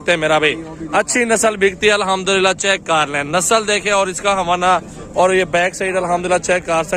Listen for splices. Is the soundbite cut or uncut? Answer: uncut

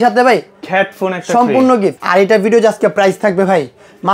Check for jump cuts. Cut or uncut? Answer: cut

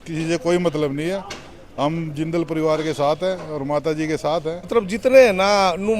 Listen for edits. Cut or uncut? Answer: cut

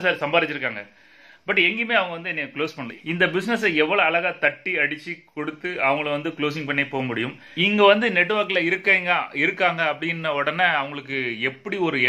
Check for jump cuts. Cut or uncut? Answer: cut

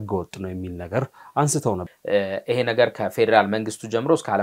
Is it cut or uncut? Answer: cut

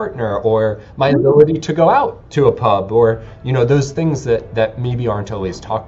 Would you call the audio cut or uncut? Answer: uncut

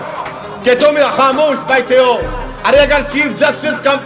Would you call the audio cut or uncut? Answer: uncut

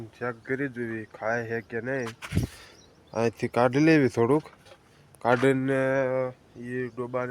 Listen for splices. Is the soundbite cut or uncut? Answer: uncut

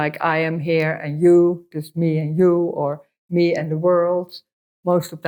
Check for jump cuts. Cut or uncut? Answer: uncut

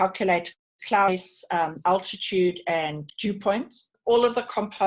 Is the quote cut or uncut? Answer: cut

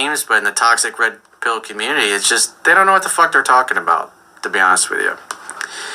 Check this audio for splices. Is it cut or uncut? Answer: uncut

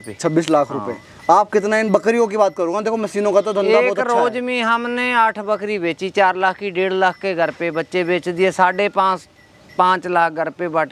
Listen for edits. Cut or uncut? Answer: uncut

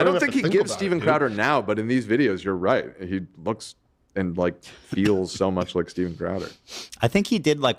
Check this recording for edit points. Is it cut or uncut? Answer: uncut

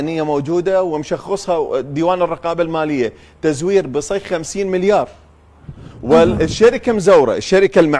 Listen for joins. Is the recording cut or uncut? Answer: uncut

